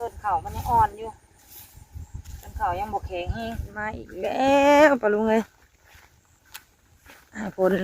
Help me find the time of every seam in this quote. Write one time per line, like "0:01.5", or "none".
0:04.1